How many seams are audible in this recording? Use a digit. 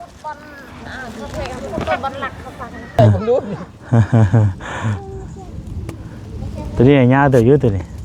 1